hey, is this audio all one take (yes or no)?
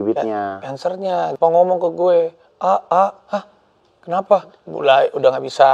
no